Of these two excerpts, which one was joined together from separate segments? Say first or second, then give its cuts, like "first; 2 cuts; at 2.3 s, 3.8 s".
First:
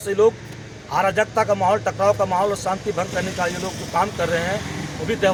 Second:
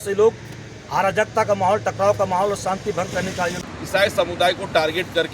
second; 1 cut; at 3.7 s